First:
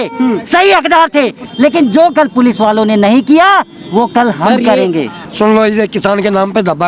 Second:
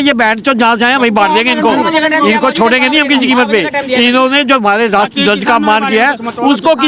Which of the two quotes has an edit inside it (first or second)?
first